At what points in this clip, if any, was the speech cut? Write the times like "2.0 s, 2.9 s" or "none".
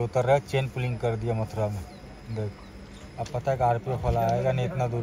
none